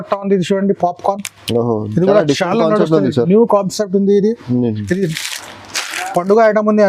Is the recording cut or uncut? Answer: uncut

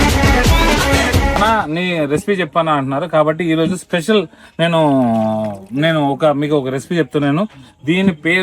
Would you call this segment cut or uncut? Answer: cut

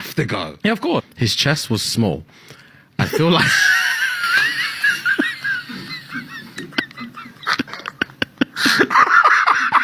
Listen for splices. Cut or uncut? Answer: uncut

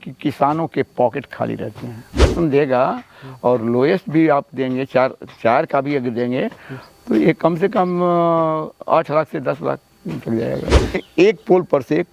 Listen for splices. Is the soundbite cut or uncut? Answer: cut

